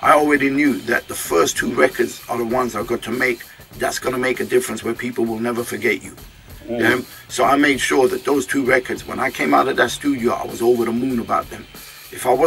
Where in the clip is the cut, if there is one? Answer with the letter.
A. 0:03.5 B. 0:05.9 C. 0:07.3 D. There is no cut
D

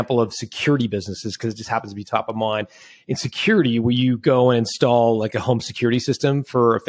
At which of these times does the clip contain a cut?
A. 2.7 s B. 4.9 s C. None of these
C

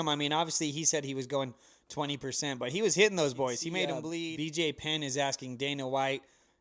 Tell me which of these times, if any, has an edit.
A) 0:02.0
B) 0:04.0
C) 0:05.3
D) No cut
B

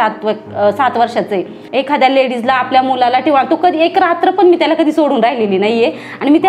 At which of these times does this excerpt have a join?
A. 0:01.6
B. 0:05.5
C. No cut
A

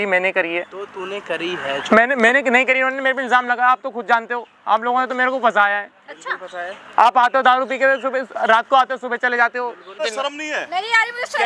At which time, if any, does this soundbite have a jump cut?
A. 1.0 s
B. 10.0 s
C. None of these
B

